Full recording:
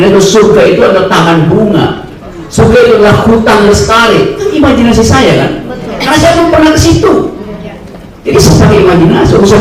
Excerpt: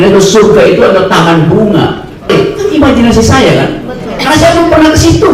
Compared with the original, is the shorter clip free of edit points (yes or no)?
no